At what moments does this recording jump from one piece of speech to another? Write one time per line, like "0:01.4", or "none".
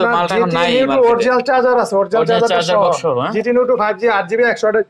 none

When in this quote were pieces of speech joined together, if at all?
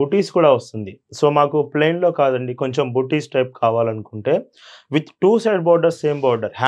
none

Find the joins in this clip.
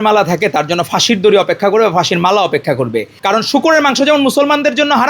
0:03.2

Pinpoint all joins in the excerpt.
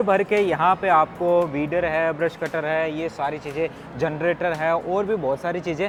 none

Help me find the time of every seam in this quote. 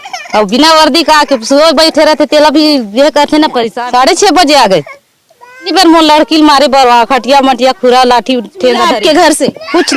0:03.7
0:05.7
0:08.9

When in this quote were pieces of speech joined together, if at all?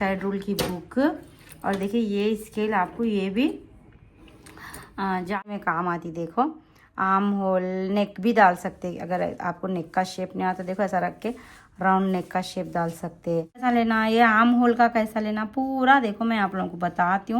0:05.4
0:13.6

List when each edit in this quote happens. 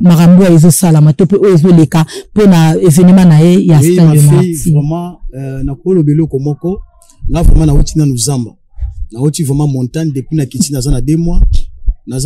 none

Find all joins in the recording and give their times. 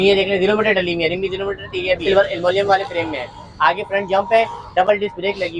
0:02.0

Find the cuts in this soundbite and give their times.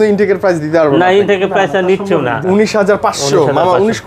0:02.4

